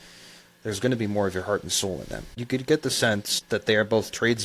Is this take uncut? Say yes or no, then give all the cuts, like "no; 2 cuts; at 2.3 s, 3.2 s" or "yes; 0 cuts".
no; 2 cuts; at 2.4 s, 3.3 s